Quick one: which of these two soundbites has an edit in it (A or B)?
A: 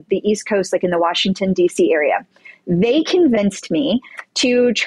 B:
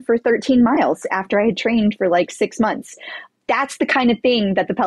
B